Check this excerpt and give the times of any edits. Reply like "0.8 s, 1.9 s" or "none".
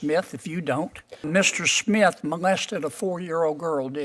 1.3 s